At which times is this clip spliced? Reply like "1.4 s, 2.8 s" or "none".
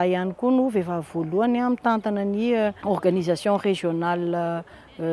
2.8 s